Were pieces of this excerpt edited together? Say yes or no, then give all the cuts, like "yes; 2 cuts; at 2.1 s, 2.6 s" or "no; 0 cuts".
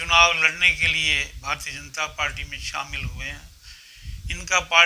no; 0 cuts